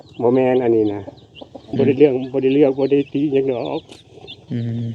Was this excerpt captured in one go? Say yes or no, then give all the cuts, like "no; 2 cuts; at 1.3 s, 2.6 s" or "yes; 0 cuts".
no; 1 cut; at 1.6 s